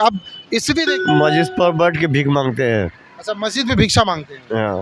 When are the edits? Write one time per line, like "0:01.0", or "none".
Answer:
0:00.9